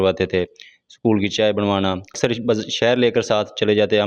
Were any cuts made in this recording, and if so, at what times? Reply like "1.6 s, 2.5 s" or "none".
2.2 s